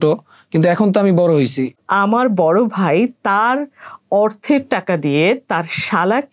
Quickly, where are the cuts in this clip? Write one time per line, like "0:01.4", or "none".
0:01.8

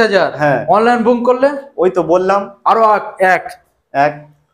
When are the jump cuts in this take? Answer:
none

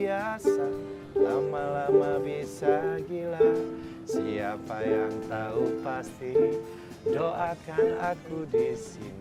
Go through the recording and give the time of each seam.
none

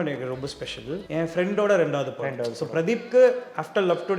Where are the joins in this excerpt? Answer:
0:01.0

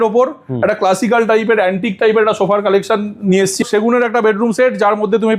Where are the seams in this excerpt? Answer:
0:03.6

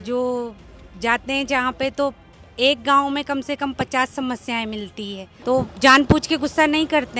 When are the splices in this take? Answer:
0:05.2

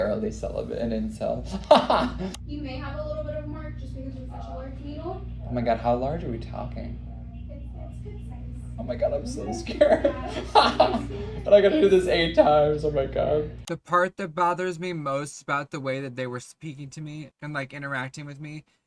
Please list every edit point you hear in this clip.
0:02.2

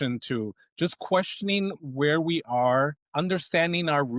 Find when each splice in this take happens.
0:03.0

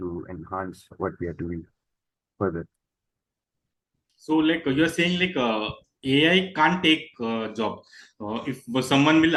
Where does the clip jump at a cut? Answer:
none

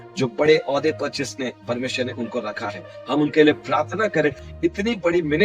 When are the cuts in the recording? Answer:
0:04.5

